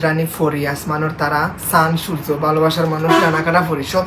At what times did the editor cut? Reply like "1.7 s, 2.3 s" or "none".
none